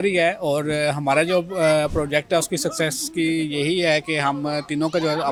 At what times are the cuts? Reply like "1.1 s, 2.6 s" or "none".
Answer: none